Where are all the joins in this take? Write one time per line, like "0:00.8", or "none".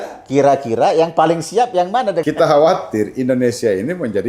0:02.2